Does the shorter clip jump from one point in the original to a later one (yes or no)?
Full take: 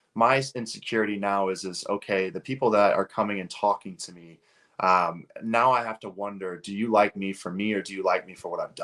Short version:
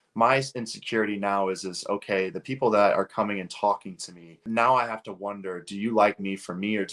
yes